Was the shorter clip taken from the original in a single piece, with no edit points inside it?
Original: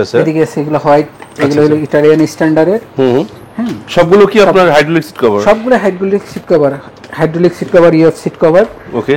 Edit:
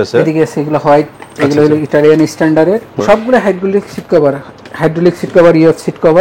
no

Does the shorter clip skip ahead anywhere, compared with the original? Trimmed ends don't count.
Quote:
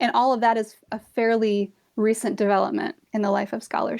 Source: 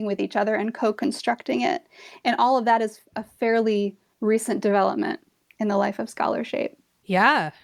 yes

